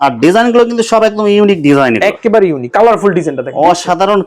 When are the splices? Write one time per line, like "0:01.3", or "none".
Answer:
0:02.7